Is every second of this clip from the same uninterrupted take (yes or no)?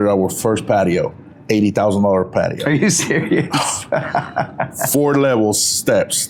yes